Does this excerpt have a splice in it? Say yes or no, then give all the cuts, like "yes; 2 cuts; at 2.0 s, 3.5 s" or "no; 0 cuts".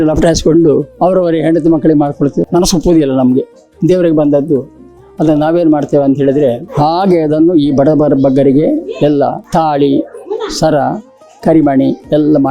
yes; 3 cuts; at 0.9 s, 2.4 s, 6.7 s